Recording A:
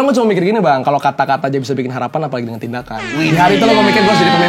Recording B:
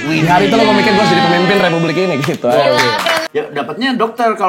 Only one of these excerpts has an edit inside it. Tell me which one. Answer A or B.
B